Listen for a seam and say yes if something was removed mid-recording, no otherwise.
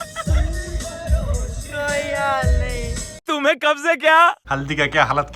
yes